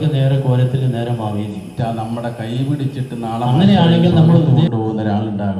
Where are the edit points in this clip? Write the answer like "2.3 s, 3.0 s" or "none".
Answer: 1.7 s, 3.5 s, 4.7 s